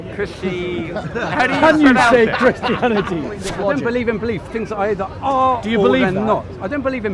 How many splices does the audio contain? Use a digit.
1